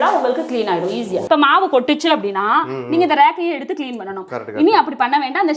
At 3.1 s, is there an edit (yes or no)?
no